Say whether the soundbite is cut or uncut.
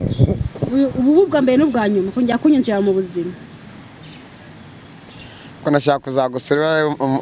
uncut